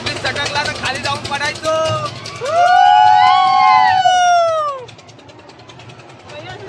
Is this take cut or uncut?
uncut